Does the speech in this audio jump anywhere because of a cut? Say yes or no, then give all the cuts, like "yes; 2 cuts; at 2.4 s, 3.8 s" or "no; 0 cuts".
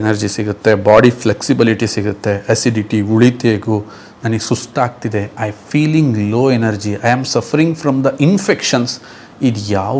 no; 0 cuts